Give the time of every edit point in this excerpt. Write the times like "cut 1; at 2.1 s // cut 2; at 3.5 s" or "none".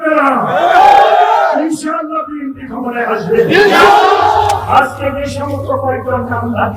cut 1; at 4.6 s